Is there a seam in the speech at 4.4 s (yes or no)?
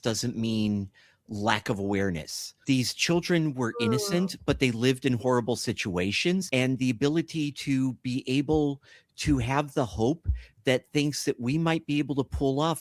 no